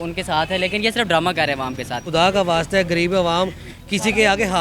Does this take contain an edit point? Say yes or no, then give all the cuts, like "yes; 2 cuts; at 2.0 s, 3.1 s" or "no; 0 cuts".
yes; 1 cut; at 2.1 s